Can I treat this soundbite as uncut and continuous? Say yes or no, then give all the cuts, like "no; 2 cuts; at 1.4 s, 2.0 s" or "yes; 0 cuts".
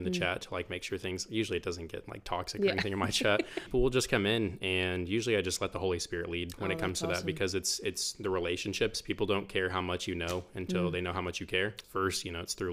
no; 2 cuts; at 3.7 s, 11.8 s